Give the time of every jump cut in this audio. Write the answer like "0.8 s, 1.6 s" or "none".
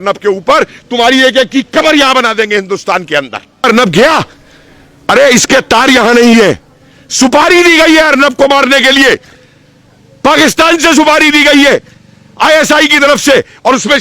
3.6 s